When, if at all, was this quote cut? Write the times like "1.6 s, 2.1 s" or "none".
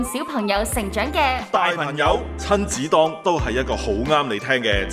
2.3 s